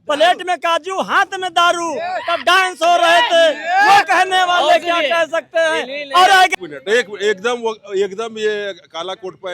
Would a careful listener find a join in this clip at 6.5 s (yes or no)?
yes